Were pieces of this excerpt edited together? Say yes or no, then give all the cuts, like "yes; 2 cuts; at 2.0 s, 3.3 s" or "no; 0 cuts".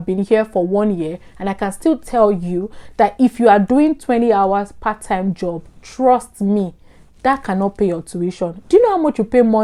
no; 0 cuts